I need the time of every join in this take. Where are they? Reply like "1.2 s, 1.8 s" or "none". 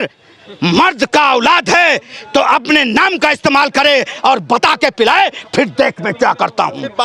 none